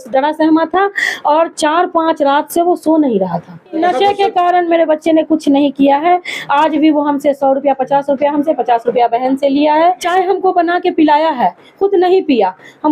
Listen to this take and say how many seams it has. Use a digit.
2